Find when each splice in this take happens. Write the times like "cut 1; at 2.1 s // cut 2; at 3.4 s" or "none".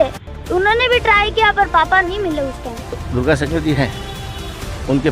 cut 1; at 3.0 s